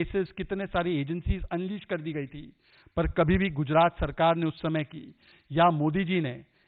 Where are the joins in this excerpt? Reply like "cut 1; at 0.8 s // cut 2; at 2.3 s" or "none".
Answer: none